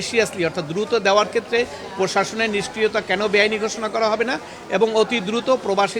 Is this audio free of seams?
yes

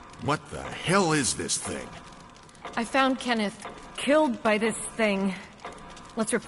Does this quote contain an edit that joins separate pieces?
no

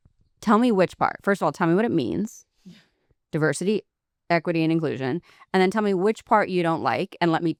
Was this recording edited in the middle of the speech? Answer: no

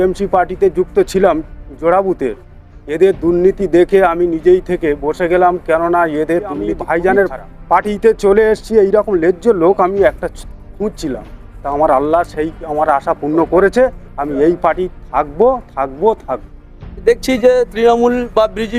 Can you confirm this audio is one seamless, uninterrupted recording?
no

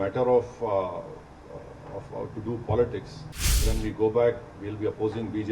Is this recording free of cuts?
no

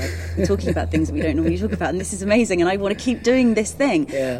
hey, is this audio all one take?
yes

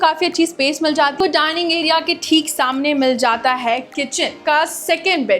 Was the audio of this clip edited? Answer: yes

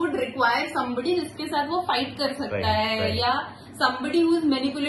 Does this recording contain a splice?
no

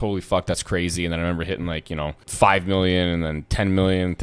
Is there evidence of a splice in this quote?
yes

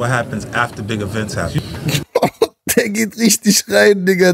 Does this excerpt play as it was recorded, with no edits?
no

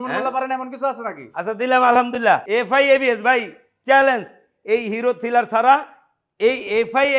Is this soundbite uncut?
no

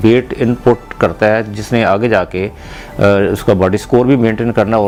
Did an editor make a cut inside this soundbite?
no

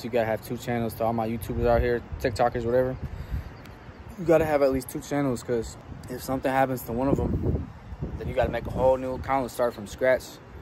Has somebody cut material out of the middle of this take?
no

